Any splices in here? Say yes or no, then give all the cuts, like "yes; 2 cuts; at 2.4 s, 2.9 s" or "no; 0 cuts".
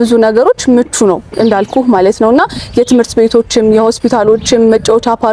no; 0 cuts